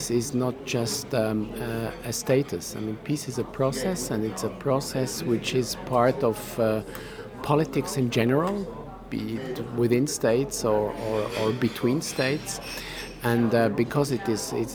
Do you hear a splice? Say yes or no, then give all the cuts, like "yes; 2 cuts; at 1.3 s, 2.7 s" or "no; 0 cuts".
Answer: no; 0 cuts